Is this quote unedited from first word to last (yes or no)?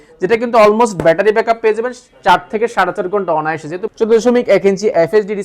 no